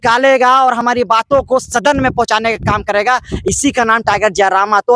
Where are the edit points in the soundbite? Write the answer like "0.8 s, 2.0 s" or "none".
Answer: none